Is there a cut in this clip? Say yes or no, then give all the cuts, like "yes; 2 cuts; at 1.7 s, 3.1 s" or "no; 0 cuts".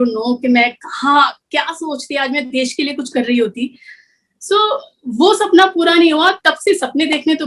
no; 0 cuts